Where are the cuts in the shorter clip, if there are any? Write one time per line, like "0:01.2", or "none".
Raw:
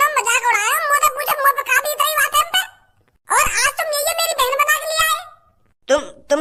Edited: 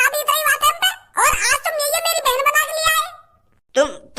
0:00.9